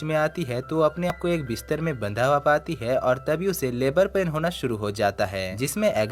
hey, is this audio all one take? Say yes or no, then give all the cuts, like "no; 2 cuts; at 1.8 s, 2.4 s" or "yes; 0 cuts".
no; 1 cut; at 1.1 s